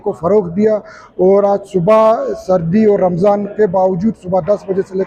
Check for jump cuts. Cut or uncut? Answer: uncut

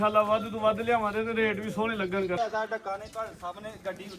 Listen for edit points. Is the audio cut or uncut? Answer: cut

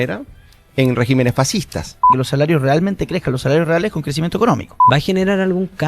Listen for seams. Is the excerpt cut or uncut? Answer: cut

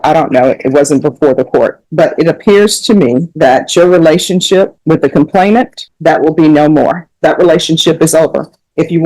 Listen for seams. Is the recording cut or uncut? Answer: cut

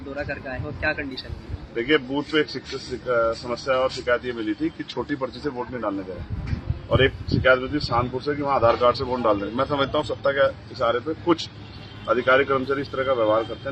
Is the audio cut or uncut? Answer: uncut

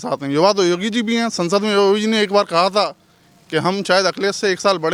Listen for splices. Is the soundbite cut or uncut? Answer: uncut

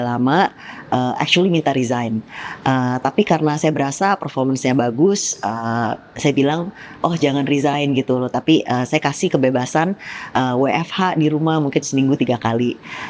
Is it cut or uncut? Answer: uncut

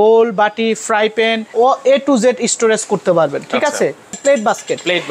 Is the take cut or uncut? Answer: cut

